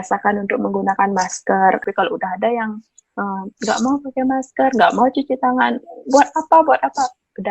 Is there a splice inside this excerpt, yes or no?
yes